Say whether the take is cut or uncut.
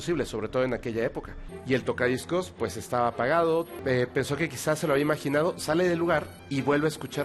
cut